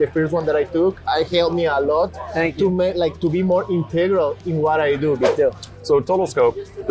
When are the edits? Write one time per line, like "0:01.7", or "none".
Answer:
0:05.3